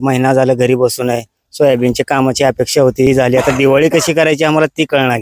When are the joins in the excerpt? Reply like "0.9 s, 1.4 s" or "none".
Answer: 3.1 s